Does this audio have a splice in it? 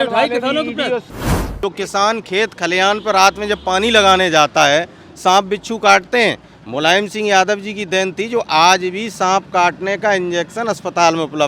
yes; 1 cut; at 1.3 s

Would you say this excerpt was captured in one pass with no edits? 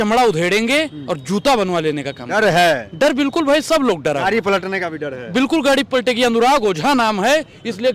yes; 0 cuts

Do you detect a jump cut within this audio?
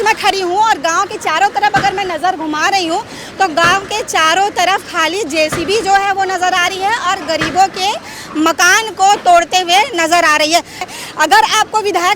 yes; 1 cut; at 10.8 s

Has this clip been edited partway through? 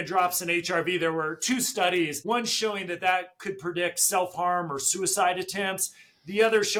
no; 0 cuts

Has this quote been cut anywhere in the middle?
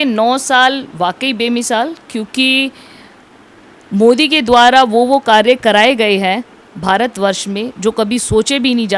no; 0 cuts

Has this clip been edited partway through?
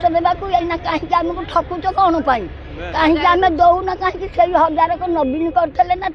no; 0 cuts

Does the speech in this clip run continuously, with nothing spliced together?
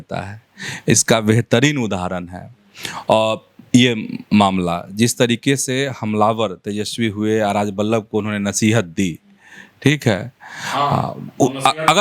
yes; 0 cuts

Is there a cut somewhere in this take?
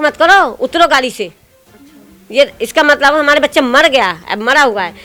no; 0 cuts

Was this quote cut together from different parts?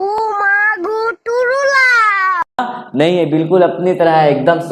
yes; 1 cut; at 2.6 s

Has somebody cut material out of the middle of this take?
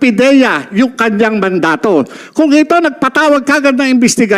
no; 0 cuts

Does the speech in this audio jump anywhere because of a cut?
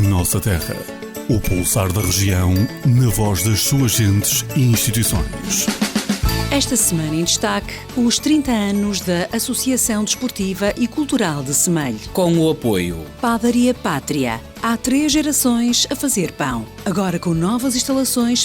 yes; 1 cut; at 1.1 s

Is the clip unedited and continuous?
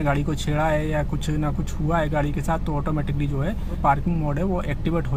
yes; 0 cuts

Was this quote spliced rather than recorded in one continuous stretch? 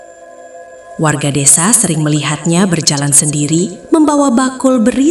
no; 0 cuts

